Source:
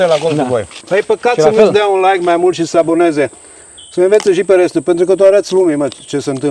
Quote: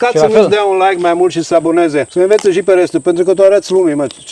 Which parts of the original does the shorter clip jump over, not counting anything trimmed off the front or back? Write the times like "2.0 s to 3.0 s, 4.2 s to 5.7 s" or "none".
3.3 s to 3.9 s